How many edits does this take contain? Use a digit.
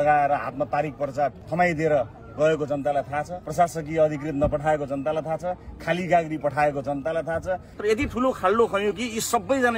3